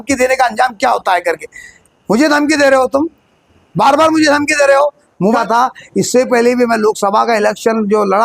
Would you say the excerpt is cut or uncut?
cut